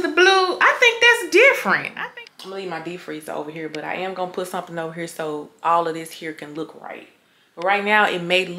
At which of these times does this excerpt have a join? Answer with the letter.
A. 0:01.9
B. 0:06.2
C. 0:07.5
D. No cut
A